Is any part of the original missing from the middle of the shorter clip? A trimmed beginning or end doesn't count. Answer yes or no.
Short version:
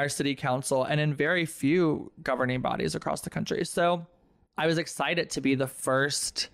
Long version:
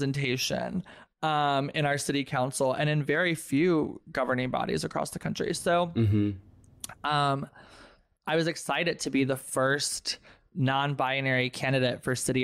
yes